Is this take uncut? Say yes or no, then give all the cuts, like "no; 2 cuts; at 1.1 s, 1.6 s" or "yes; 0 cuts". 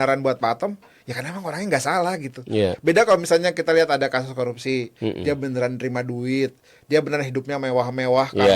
yes; 0 cuts